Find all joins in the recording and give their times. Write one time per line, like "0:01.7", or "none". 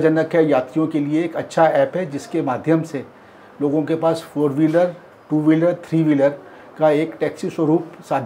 none